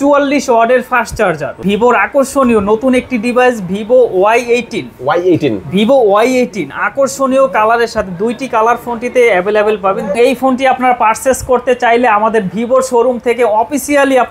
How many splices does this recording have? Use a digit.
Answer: 2